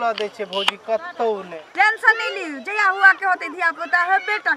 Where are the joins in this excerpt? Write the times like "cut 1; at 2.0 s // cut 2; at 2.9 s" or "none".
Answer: cut 1; at 1.6 s